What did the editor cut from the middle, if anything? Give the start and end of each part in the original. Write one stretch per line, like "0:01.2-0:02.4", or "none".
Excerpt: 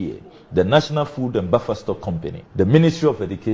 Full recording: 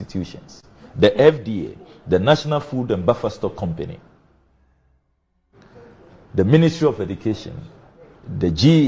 0:03.9-0:06.2